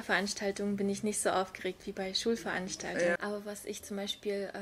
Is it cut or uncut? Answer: cut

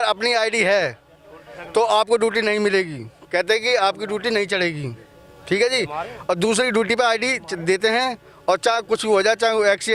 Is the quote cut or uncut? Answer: uncut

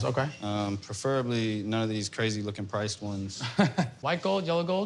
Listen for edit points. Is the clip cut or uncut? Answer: cut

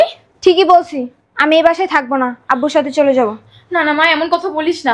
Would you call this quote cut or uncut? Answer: uncut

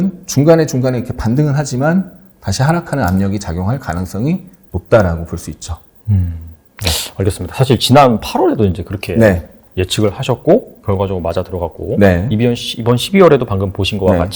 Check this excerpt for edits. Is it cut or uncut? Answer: uncut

